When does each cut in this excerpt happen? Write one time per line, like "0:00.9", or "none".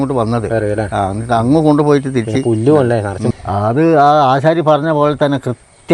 0:03.3